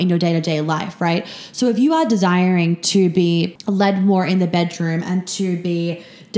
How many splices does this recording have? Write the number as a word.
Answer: one